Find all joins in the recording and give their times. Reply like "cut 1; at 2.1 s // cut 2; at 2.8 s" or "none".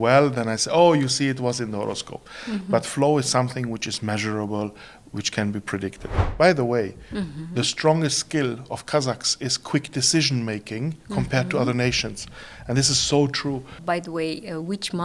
cut 1; at 6.2 s // cut 2; at 13.7 s